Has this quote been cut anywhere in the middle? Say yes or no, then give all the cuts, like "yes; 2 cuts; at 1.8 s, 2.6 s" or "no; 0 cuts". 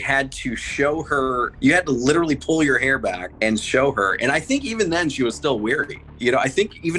yes; 3 cuts; at 1.5 s, 3.3 s, 6.0 s